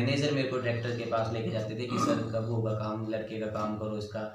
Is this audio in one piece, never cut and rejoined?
yes; 0 cuts

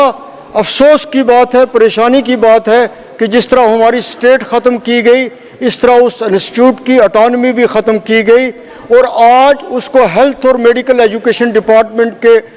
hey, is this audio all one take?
yes; 0 cuts

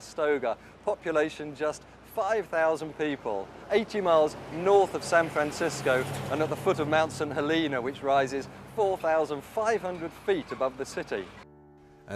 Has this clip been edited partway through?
yes; 1 cut; at 6.0 s

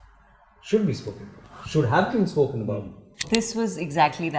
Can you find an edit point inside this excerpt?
yes; 1 cut; at 3.2 s

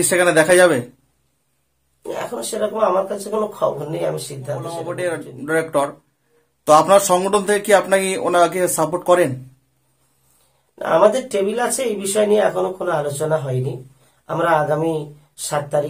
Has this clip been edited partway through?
yes; 1 cut; at 4.8 s

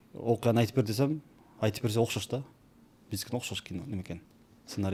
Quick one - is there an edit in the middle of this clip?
no; 0 cuts

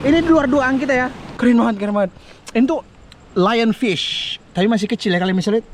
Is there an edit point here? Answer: yes; 1 cut; at 1.2 s

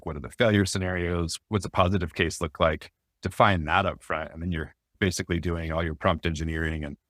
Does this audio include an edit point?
yes; 1 cut; at 1.4 s

